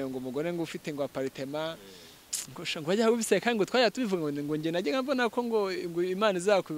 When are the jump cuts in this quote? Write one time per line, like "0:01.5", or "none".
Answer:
none